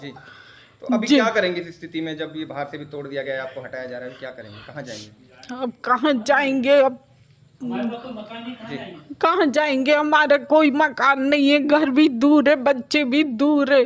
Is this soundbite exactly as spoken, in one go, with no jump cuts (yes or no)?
yes